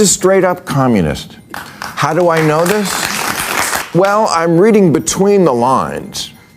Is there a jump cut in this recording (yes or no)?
yes